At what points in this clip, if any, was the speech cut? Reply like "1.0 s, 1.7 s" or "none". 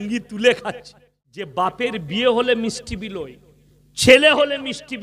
1.5 s